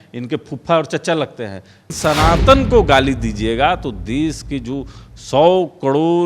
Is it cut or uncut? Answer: cut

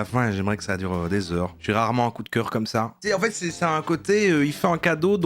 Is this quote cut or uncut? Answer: cut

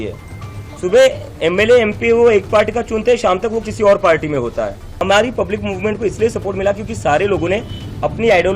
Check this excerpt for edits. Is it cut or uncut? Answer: cut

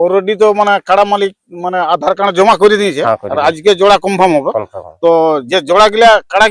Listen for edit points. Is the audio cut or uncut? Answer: cut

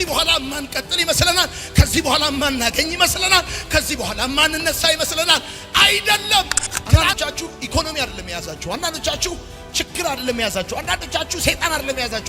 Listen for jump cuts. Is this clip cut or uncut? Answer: cut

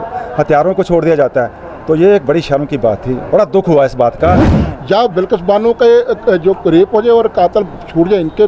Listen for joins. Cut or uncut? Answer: cut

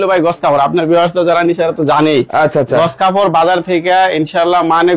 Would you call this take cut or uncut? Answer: uncut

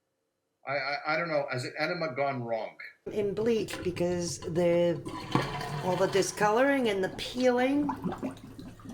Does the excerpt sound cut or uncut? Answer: cut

